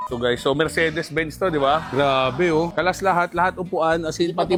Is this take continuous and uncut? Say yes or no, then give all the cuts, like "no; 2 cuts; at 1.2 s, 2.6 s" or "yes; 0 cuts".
yes; 0 cuts